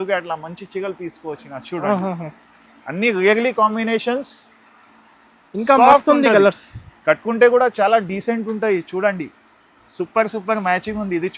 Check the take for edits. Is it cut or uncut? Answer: uncut